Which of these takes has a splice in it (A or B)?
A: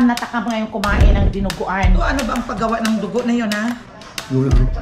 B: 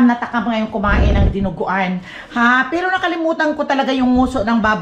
A